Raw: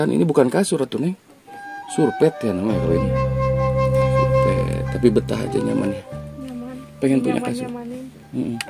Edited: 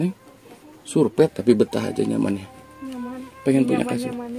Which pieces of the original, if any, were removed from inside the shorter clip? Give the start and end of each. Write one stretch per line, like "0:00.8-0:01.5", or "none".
0:02.4-0:04.9